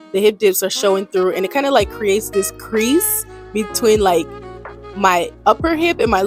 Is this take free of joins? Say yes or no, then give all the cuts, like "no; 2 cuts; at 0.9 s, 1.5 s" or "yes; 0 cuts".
yes; 0 cuts